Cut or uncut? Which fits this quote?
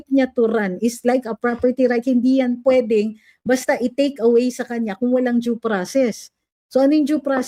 uncut